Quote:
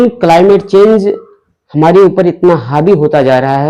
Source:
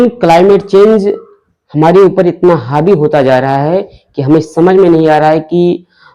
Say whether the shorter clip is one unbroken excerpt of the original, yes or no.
yes